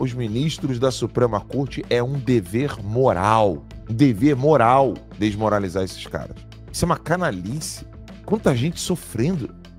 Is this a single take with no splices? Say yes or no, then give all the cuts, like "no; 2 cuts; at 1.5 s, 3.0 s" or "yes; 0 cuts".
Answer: yes; 0 cuts